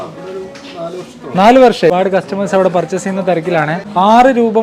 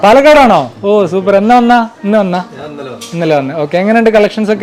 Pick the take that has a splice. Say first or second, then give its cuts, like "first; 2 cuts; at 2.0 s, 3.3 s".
first; 1 cut; at 1.9 s